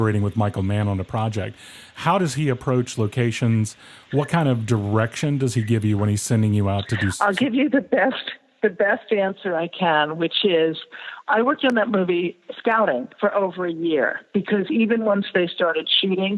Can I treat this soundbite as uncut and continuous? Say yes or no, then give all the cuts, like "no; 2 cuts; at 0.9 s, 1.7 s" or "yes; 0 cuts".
yes; 0 cuts